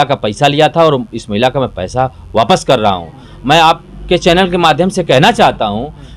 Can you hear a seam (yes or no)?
no